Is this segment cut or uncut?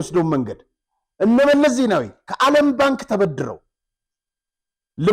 uncut